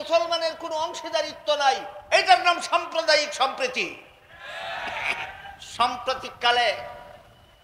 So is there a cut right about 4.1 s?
no; 1 cut; at 5.6 s

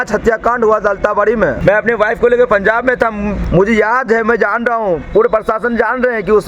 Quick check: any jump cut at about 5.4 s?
no; 2 cuts; at 1.6 s, 3.4 s

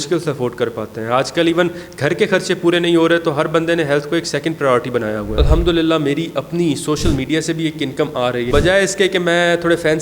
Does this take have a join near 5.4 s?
yes; 2 cuts; at 5.4 s, 8.5 s

